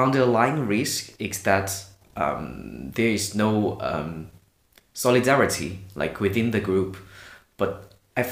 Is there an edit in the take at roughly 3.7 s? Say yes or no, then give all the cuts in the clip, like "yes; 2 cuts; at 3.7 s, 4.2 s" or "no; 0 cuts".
no; 0 cuts